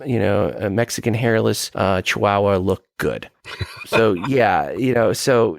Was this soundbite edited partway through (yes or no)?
yes